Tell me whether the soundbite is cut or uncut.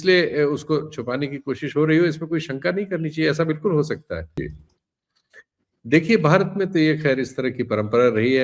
cut